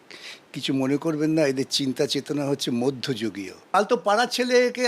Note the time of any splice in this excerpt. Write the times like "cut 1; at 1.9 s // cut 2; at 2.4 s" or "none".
cut 1; at 3.6 s